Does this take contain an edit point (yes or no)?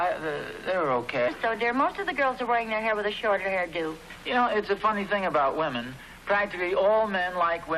no